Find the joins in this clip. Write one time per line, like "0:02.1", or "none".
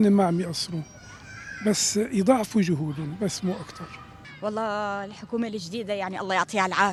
none